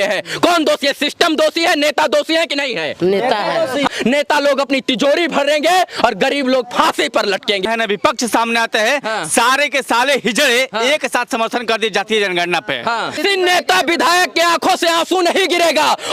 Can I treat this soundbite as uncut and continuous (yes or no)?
no